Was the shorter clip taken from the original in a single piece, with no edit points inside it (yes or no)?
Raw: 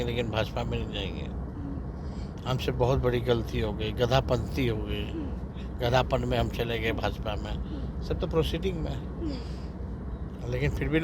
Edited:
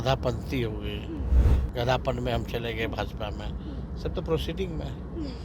yes